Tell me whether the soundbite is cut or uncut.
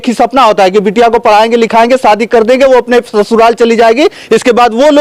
uncut